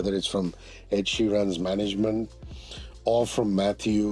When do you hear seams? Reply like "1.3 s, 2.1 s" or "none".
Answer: none

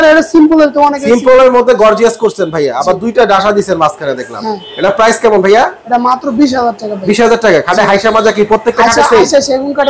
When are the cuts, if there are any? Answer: none

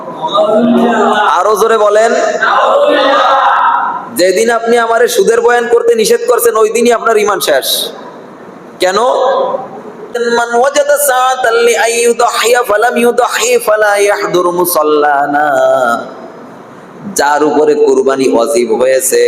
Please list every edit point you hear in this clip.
10.2 s

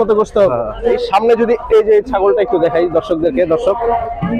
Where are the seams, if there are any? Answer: 0.9 s

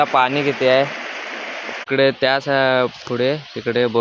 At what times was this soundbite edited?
1.8 s

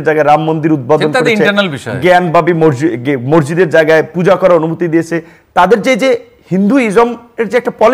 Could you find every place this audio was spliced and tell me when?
5.2 s

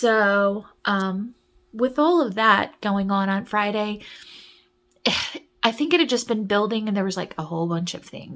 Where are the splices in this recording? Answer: none

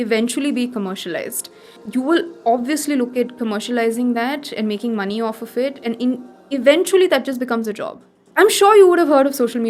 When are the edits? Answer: 1.8 s, 8.2 s

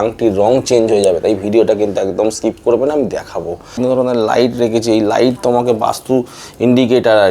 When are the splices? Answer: 3.8 s

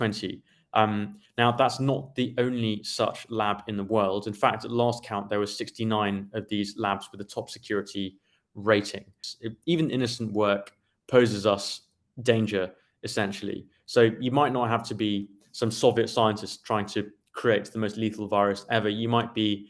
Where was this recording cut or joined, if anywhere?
9.2 s

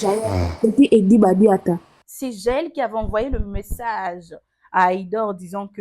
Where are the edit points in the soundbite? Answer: 1.8 s

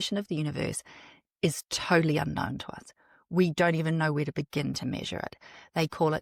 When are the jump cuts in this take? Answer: none

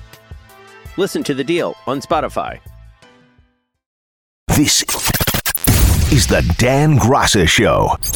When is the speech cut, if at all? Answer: 4.3 s

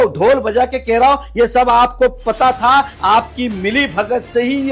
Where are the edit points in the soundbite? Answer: none

